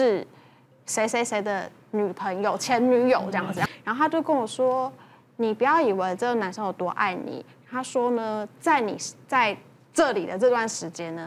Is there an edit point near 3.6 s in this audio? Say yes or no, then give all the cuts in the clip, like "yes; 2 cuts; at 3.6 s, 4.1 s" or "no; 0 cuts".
yes; 1 cut; at 3.6 s